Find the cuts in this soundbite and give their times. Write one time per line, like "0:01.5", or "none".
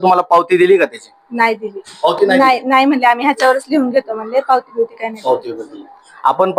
none